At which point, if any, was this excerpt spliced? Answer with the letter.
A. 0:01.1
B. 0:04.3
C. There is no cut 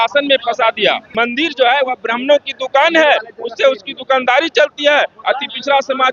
A